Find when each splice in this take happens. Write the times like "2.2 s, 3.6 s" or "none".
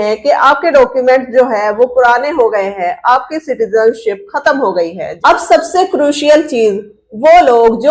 5.0 s